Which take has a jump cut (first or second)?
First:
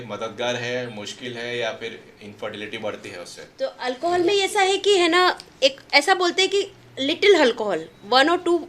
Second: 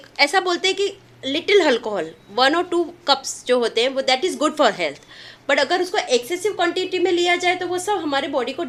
first